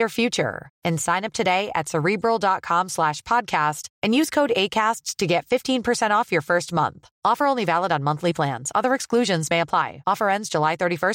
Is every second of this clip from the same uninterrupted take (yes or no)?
yes